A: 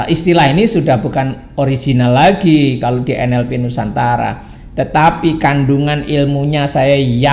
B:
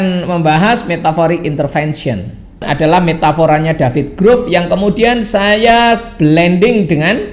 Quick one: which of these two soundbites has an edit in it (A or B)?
B